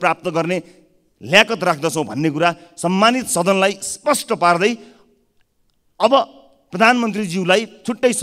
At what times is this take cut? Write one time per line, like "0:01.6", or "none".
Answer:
none